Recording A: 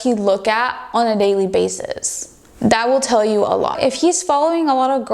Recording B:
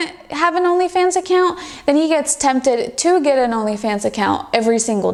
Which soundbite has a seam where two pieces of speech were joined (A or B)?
A